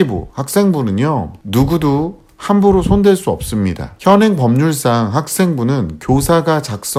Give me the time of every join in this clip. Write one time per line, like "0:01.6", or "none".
none